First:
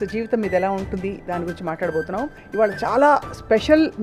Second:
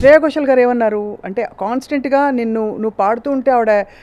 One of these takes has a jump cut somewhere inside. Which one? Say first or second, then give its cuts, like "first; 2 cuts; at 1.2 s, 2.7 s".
first; 1 cut; at 2.4 s